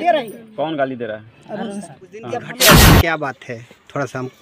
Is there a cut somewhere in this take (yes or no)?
yes